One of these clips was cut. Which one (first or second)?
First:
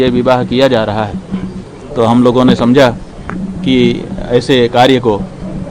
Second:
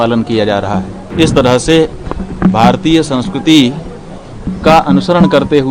second